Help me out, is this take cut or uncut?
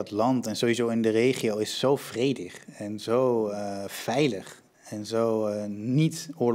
uncut